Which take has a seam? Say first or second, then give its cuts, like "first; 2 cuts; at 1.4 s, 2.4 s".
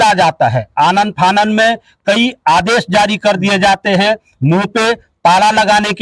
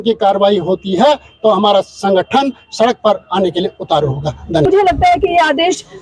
second; 1 cut; at 4.6 s